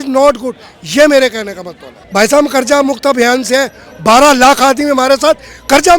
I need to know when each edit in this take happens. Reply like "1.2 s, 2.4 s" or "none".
2.0 s

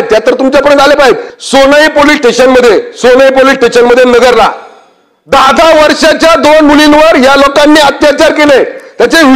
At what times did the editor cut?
1.3 s

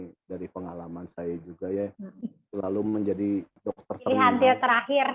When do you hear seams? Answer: 3.6 s

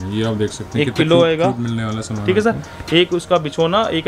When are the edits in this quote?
none

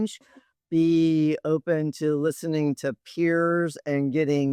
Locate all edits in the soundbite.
none

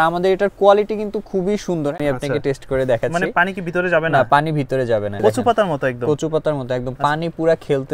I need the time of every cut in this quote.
2.0 s, 5.2 s

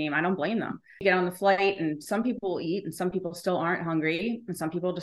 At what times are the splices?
1.0 s

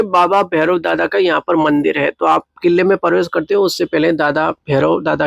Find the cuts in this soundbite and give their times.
none

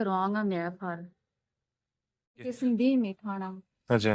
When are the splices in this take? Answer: 2.6 s

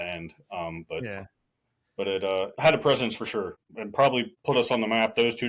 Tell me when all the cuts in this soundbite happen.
2.5 s, 3.6 s, 4.3 s

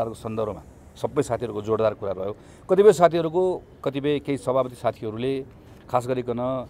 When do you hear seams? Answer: none

